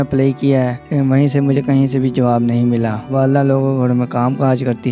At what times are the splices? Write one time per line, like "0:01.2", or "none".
0:03.1